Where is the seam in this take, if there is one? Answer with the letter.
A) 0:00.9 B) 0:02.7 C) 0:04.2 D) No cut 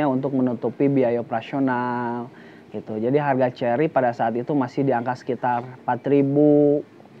D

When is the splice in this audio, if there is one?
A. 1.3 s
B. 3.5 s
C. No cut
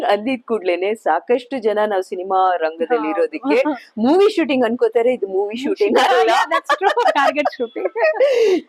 C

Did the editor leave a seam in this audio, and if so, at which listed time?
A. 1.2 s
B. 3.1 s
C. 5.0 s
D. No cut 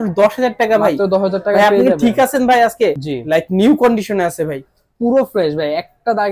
B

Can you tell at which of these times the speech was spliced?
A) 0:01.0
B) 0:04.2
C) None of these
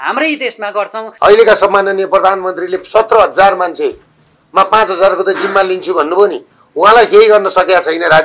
A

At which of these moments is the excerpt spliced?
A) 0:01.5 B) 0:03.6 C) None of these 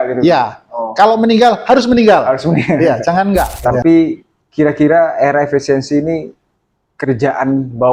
B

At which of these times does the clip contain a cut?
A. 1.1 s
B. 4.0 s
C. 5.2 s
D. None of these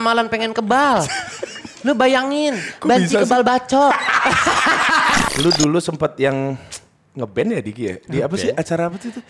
C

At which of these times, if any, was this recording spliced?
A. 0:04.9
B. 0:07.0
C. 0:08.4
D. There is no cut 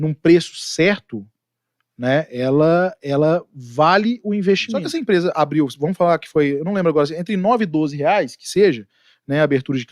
A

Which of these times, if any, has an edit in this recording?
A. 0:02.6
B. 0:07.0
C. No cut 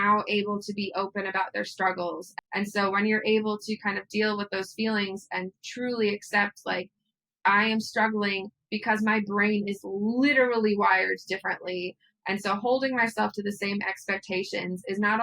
A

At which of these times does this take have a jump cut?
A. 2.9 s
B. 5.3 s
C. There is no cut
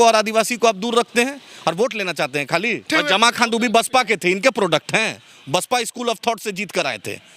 A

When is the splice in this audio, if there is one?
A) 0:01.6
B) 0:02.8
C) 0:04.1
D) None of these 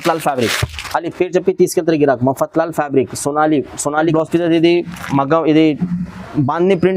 C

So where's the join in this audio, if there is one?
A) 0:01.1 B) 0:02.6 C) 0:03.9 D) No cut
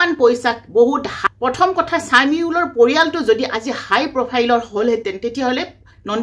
A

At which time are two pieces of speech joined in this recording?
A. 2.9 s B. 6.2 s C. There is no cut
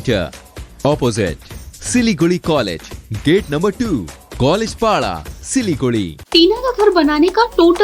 B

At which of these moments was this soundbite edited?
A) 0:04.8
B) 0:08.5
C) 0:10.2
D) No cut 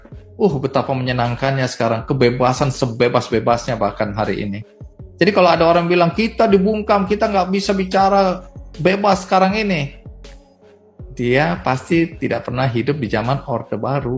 D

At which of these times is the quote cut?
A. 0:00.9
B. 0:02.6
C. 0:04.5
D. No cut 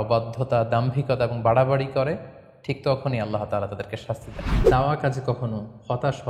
C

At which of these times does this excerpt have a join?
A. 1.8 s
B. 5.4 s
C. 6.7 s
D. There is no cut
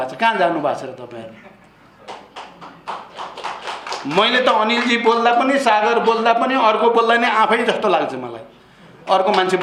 D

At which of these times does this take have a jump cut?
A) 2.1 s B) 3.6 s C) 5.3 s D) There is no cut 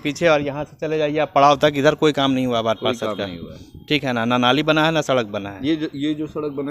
D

